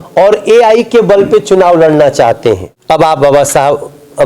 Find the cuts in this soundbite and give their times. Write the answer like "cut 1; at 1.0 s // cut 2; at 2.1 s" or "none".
cut 1; at 2.7 s